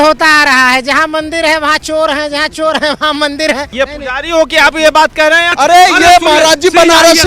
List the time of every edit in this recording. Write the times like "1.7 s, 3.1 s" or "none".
3.7 s, 5.5 s